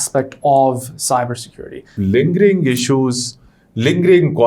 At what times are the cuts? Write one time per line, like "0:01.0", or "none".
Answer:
0:02.0